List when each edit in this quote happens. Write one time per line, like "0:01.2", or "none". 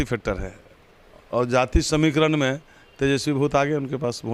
none